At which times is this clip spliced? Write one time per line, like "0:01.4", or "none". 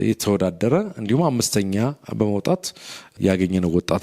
0:03.1